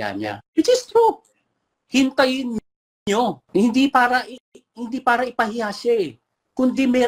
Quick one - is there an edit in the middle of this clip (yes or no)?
yes